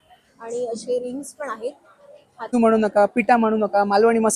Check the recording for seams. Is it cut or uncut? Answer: cut